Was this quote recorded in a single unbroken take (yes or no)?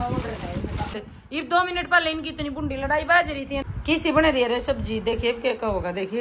no